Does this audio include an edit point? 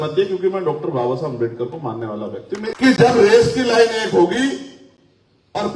yes; 1 cut; at 2.7 s

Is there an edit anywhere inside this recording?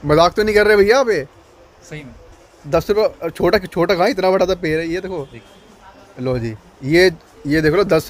no; 0 cuts

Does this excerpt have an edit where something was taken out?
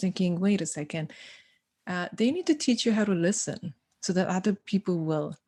no; 0 cuts

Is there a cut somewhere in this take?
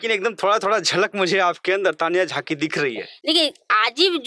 no; 0 cuts

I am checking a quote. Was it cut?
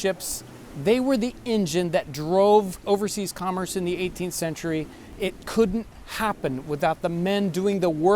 yes; 2 cuts; at 2.8 s, 5.0 s

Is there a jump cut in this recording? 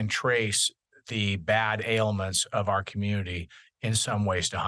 no; 0 cuts

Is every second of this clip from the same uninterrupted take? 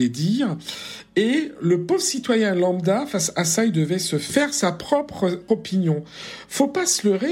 no; 2 cuts; at 4.3 s, 5.4 s

